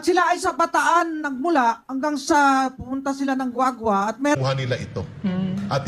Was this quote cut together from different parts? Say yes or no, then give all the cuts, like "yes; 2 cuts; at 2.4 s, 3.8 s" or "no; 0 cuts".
yes; 1 cut; at 4.4 s